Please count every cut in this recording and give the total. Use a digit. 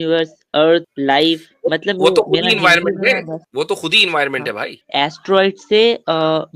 3